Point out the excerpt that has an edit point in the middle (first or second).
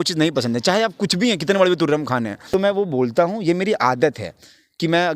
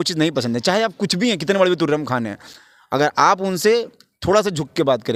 first